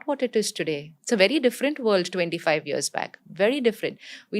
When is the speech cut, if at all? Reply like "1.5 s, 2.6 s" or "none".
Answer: 0.9 s